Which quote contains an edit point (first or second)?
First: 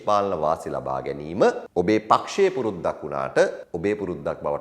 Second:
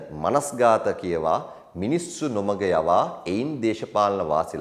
first